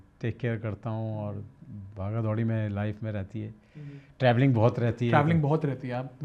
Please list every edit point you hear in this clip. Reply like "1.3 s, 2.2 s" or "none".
none